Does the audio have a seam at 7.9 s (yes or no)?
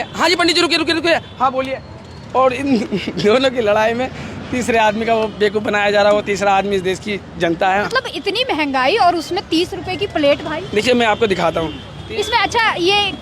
yes